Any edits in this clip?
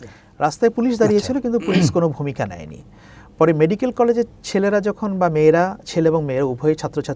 no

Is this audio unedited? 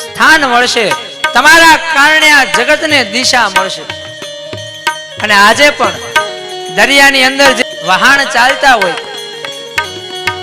no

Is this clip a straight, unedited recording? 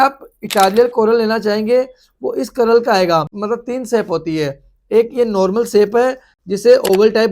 no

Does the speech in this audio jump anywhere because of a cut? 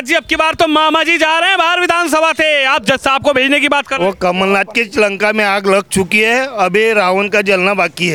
no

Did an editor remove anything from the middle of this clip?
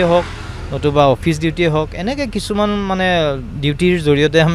no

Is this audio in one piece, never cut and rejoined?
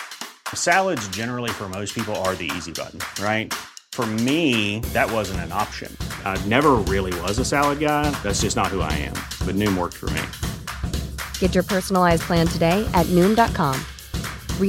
yes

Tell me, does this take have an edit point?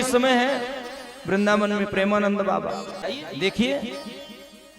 yes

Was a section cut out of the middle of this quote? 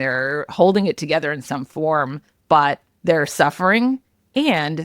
yes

